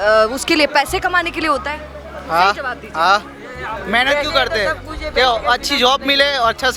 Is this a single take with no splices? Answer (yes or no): yes